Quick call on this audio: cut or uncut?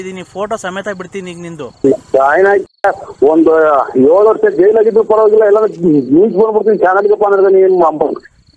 cut